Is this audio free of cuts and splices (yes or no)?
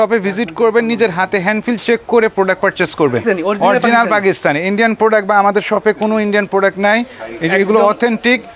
yes